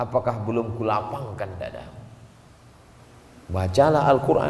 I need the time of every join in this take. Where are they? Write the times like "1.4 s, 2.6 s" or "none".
3.0 s